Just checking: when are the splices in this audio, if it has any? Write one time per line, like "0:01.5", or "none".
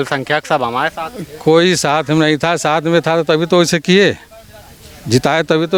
none

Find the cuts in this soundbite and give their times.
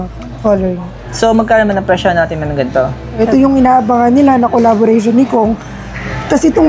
0:03.2

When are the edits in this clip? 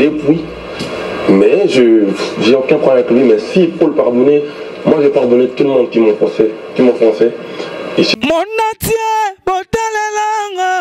0:08.1

